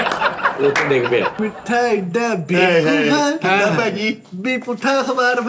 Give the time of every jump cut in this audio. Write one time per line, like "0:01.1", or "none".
0:01.4